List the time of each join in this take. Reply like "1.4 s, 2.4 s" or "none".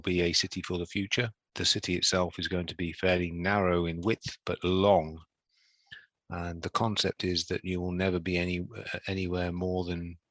1.5 s